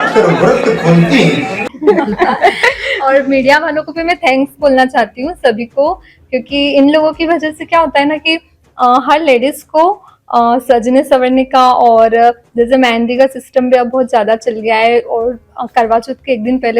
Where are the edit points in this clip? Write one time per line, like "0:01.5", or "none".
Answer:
0:01.6